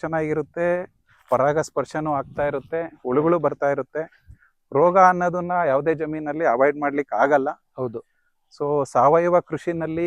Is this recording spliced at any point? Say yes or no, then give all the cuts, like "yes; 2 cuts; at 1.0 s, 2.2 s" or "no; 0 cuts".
no; 0 cuts